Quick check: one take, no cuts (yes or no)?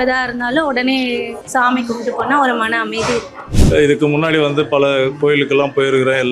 no